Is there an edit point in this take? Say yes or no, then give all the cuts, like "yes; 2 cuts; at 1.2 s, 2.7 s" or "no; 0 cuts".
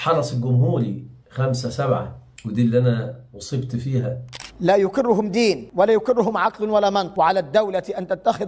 yes; 3 cuts; at 4.2 s, 5.6 s, 7.1 s